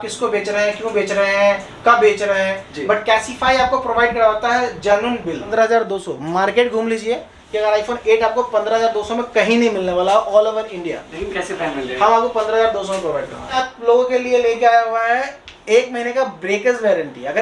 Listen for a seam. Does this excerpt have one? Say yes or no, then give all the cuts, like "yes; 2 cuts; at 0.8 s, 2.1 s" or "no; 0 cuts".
yes; 2 cuts; at 5.5 s, 13.6 s